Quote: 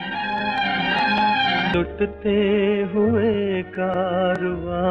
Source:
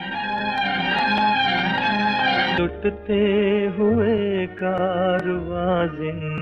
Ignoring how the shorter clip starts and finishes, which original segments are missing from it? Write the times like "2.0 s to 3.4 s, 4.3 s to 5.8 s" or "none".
1.7 s to 2.6 s